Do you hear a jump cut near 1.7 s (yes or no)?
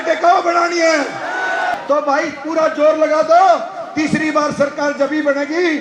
yes